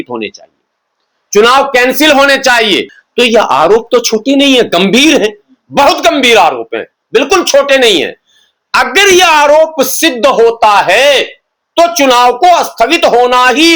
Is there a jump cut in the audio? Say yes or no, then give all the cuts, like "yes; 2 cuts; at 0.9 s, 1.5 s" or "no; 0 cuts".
yes; 1 cut; at 3.0 s